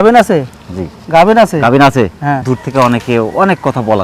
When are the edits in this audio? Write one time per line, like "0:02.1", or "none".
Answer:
0:02.4